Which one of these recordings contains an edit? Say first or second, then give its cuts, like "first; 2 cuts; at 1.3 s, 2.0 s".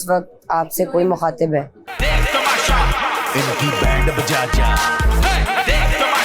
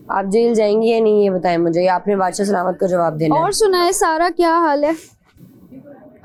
first; 1 cut; at 1.8 s